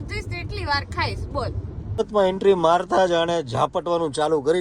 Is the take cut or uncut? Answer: cut